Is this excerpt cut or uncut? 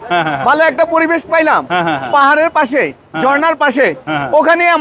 uncut